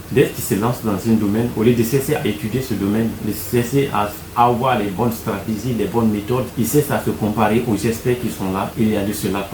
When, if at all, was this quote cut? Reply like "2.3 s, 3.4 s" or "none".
6.5 s, 8.7 s